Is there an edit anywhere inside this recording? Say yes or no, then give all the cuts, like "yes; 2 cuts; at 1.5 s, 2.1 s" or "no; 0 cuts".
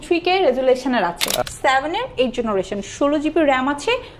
yes; 1 cut; at 1.4 s